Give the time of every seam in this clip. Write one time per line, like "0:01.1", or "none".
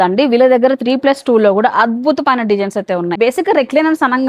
0:03.1